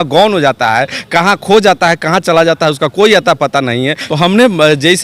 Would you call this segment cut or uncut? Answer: cut